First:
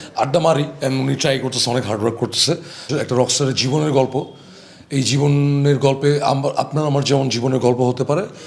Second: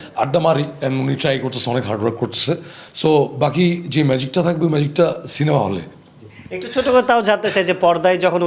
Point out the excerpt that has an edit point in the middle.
first; 1 cut; at 2.9 s

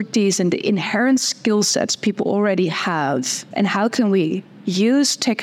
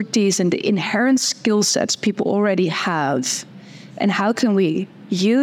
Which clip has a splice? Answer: first; 1 cut; at 3.4 s

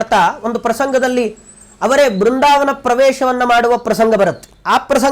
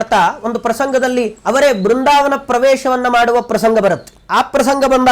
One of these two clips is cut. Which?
second; 1 cut; at 1.4 s

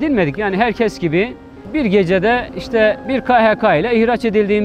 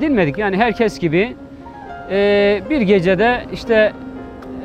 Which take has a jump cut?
first; 2 cuts; at 1.7 s, 3.0 s

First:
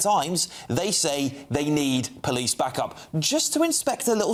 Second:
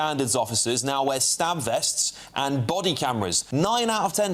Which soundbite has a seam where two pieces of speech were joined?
second; 1 cut; at 3.4 s

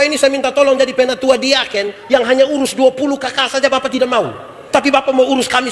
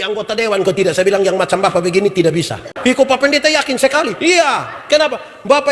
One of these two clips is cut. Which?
second; 1 cut; at 2.6 s

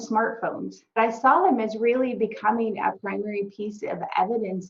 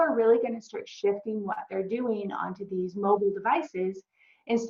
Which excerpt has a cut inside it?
first; 1 cut; at 1.0 s

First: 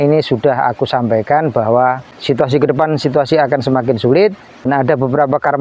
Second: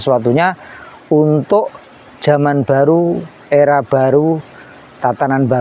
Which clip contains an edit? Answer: first; 2 cuts; at 2.1 s, 4.7 s

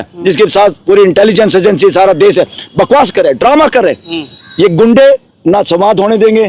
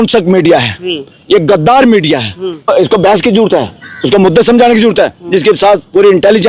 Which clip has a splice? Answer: second; 1 cut; at 2.7 s

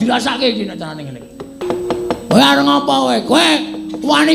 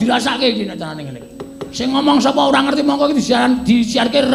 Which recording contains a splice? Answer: first; 1 cut; at 1.6 s

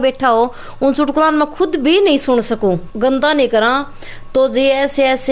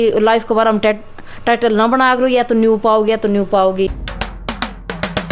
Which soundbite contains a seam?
first; 1 cut; at 2.9 s

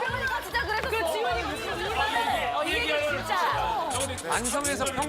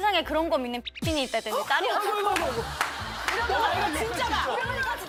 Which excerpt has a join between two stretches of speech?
first; 1 cut; at 1.7 s

